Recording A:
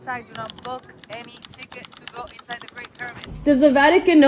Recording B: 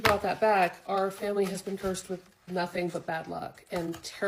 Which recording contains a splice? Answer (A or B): A